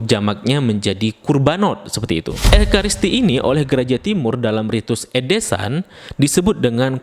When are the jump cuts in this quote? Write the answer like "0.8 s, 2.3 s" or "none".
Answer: 2.4 s